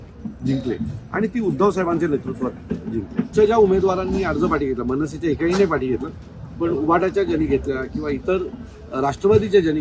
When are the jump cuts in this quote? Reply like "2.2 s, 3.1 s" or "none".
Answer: 3.3 s